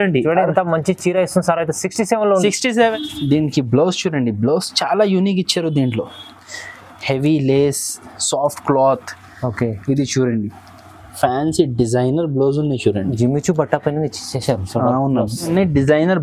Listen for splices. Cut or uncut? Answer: cut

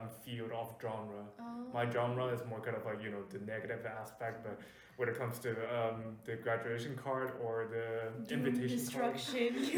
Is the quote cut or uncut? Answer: uncut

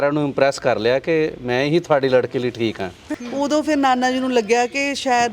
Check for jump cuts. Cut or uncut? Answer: cut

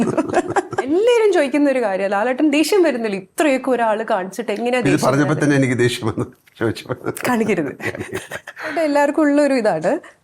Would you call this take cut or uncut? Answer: cut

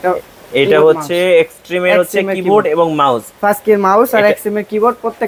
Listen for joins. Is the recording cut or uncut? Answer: uncut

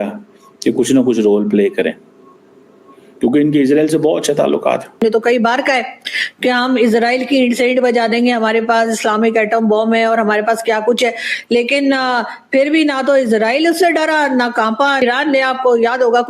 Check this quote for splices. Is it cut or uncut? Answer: cut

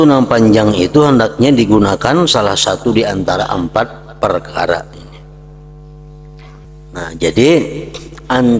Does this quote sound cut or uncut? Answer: cut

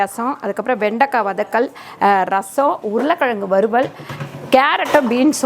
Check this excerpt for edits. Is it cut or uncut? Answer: uncut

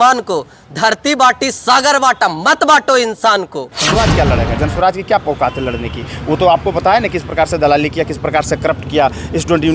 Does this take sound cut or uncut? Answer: cut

